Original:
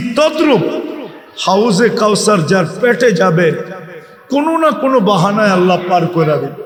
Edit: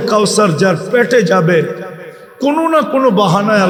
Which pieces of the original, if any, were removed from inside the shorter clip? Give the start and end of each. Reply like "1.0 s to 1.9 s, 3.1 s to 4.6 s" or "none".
none